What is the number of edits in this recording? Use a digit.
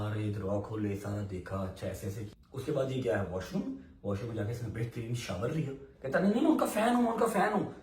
2